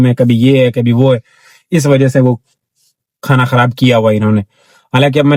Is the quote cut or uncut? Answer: uncut